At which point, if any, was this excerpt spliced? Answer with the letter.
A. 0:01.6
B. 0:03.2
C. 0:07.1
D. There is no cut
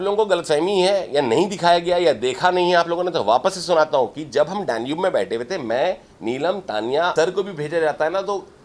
C